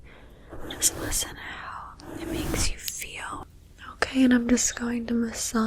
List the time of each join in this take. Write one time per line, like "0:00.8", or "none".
0:03.4